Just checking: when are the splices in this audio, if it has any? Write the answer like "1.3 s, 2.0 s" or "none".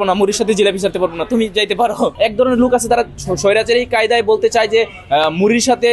2.1 s